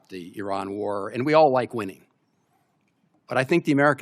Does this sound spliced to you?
no; 0 cuts

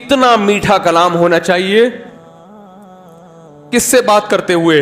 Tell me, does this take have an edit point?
no; 0 cuts

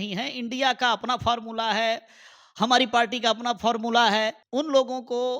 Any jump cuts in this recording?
yes; 1 cut; at 4.4 s

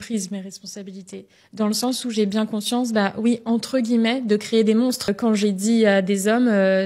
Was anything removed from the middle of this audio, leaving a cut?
yes; 1 cut; at 5.1 s

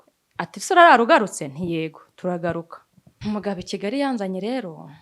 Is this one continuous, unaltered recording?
no; 1 cut; at 3.2 s

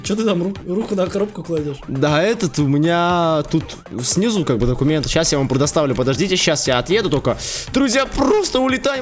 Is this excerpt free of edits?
yes; 0 cuts

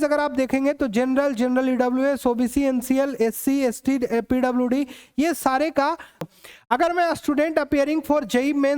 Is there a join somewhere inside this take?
yes; 1 cut; at 6.3 s

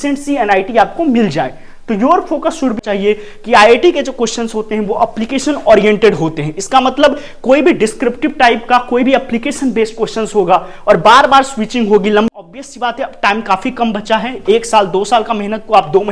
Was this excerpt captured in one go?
no; 2 cuts; at 2.8 s, 12.3 s

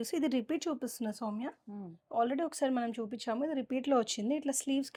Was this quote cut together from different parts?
no; 0 cuts

